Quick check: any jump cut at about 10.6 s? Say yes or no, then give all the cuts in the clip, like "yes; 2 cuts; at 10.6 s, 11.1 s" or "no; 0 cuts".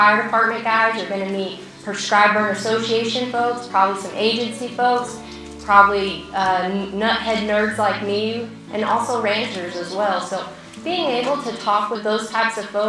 no; 2 cuts; at 8.5 s, 12.0 s